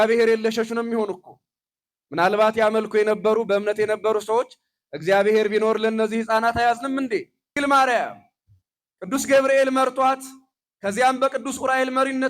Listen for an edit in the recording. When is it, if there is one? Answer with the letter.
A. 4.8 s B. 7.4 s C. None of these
B